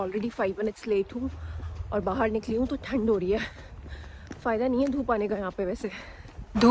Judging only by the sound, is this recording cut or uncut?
uncut